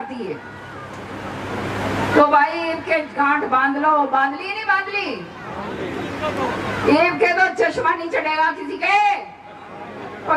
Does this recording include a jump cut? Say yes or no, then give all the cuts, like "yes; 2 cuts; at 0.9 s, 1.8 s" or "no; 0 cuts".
no; 0 cuts